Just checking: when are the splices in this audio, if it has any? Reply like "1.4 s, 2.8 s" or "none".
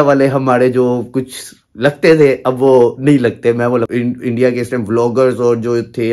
3.9 s